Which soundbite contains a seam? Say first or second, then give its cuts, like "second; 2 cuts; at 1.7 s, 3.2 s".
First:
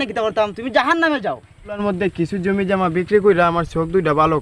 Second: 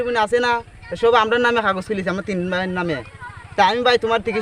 first; 1 cut; at 1.8 s